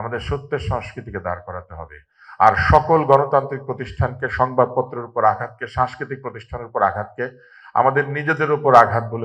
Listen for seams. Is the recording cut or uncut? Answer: uncut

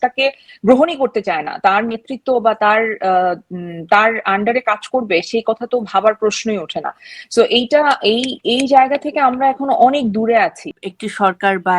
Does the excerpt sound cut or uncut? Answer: cut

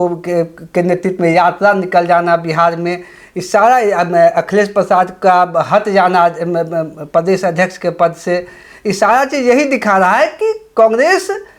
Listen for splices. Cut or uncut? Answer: uncut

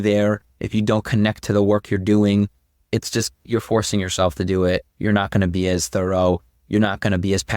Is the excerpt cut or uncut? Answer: uncut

